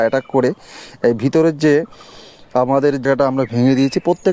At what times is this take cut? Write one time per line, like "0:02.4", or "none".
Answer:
0:03.0